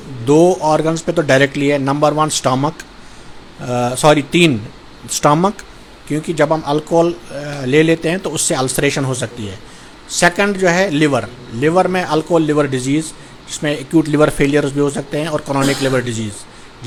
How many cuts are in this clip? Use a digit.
0